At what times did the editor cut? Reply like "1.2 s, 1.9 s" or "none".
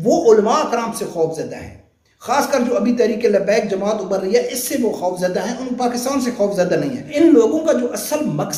7.0 s